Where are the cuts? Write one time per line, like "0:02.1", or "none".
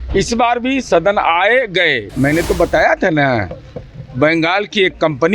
0:02.1